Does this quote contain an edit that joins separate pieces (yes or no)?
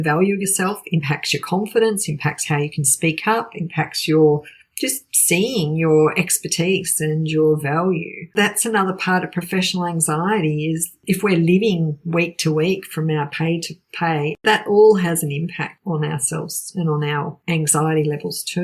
yes